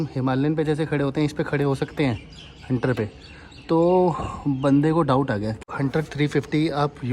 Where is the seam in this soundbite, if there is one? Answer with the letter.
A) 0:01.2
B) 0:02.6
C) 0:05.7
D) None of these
C